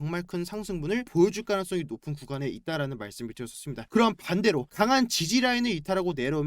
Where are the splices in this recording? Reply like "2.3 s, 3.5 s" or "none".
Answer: 3.9 s